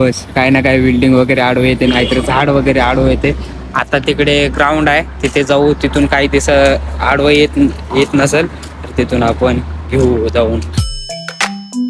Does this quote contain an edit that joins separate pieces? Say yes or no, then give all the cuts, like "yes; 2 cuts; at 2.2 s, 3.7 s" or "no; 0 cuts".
yes; 1 cut; at 10.7 s